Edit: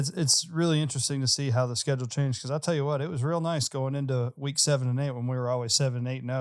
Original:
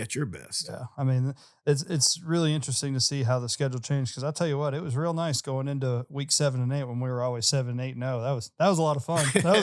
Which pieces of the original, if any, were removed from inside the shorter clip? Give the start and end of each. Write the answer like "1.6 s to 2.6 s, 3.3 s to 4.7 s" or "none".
none